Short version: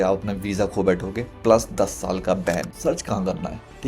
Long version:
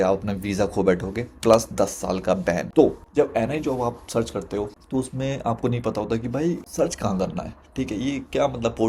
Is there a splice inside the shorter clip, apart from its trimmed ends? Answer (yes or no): yes